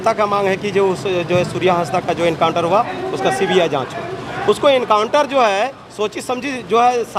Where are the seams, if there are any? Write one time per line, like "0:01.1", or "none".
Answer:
none